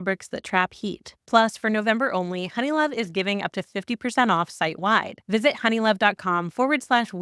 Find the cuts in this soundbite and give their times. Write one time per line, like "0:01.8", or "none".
0:01.1